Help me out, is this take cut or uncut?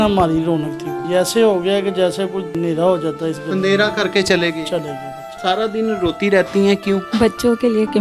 cut